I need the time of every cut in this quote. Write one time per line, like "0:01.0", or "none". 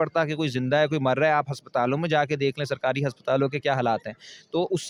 none